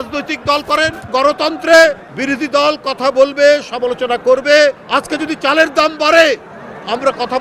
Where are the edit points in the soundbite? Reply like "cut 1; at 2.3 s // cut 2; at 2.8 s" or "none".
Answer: cut 1; at 1.1 s // cut 2; at 2.1 s // cut 3; at 4.8 s